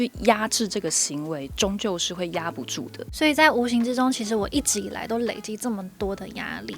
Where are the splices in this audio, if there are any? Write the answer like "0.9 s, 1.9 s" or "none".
3.0 s